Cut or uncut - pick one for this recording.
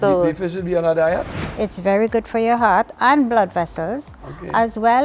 cut